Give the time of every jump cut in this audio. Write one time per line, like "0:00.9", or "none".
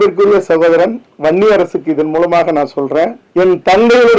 0:03.2